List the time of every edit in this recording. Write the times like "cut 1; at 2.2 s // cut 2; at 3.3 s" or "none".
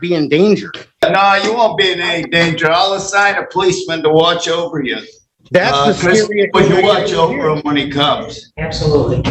cut 1; at 1.0 s